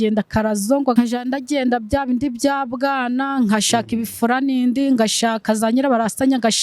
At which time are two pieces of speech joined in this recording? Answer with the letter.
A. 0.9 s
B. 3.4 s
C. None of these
A